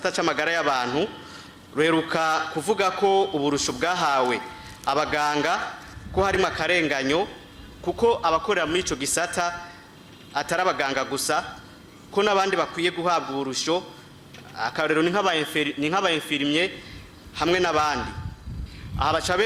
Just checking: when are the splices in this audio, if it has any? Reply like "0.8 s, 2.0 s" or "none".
none